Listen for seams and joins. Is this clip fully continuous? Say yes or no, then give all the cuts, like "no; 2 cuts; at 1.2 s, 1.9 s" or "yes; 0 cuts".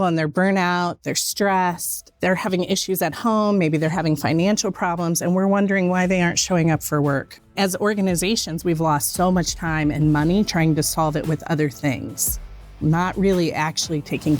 no; 3 cuts; at 2.0 s, 7.5 s, 12.7 s